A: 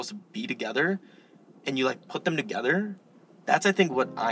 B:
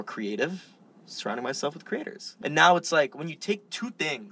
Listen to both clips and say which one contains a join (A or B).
B